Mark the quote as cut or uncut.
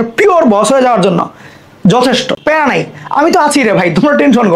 cut